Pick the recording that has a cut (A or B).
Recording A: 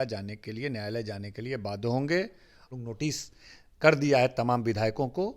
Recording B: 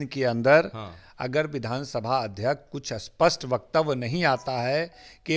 A